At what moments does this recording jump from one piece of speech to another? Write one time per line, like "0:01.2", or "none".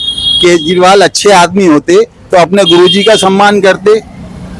none